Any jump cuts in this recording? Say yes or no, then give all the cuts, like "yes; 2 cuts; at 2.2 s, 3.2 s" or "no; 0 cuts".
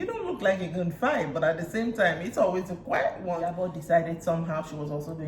yes; 1 cut; at 3.5 s